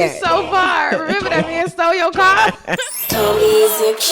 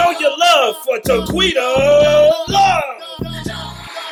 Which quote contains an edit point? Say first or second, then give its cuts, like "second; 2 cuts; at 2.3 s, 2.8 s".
first; 1 cut; at 2.8 s